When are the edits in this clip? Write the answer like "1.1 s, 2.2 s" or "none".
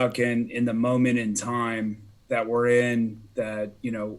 2.1 s